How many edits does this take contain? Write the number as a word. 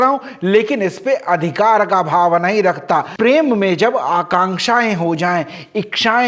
one